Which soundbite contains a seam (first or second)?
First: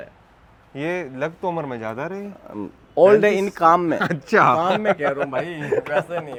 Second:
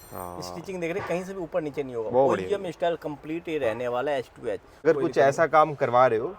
second